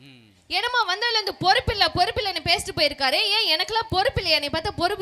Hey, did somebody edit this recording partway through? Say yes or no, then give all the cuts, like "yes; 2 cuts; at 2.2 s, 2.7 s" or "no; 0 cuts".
no; 0 cuts